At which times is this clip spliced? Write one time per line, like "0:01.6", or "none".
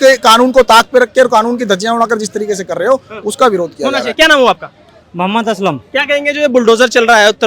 none

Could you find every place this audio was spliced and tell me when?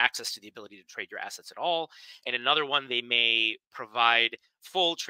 none

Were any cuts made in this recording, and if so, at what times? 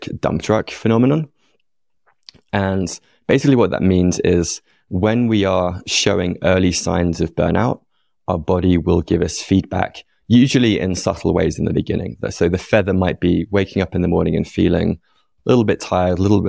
none

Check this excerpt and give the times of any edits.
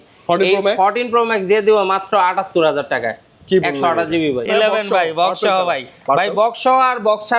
0:04.5

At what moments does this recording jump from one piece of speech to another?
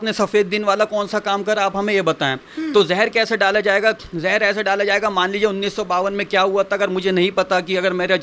0:02.5

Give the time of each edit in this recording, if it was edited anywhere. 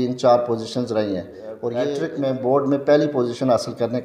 0:01.9

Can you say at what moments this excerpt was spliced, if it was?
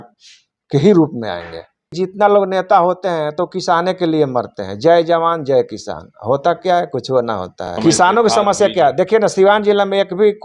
0:02.0
0:07.6

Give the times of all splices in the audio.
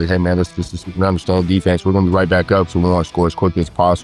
none

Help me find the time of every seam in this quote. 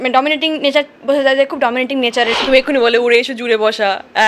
0:02.4

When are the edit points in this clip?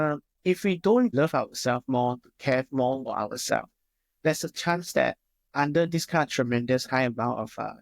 0:01.1

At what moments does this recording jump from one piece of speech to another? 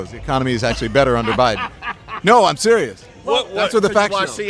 none

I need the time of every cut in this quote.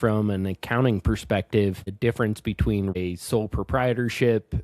0:01.9
0:03.0

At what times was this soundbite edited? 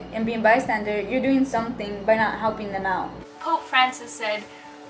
0:03.2

